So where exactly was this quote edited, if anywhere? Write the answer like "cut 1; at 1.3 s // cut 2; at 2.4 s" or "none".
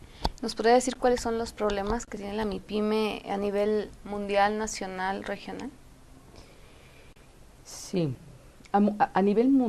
none